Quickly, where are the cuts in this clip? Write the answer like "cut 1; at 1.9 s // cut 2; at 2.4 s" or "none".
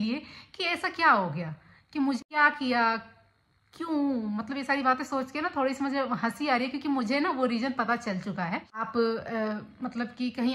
cut 1; at 2.2 s // cut 2; at 8.9 s